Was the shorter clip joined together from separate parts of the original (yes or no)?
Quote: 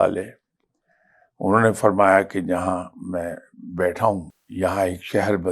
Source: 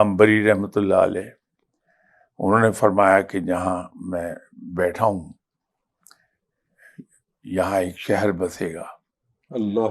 yes